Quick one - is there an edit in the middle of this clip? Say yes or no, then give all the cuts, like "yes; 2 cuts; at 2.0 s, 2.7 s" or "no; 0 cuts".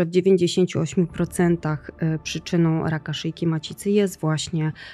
no; 0 cuts